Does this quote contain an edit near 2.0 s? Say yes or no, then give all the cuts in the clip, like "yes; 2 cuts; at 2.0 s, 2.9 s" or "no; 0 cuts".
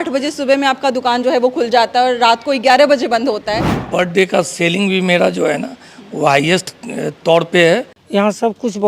no; 2 cuts; at 3.8 s, 8.0 s